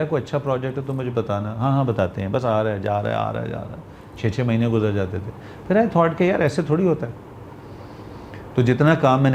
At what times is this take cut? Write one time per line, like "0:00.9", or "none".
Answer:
none